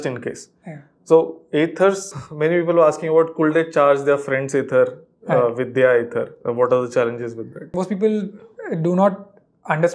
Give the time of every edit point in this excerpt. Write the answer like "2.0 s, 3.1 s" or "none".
2.1 s, 7.8 s